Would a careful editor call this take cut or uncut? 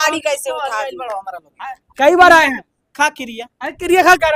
uncut